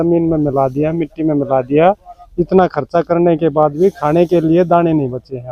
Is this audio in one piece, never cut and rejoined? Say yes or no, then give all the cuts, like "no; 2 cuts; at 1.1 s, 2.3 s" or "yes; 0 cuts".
yes; 0 cuts